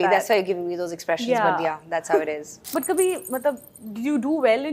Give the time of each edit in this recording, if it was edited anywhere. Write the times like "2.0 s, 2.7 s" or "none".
2.5 s